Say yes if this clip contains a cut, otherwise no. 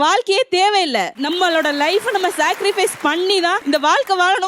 no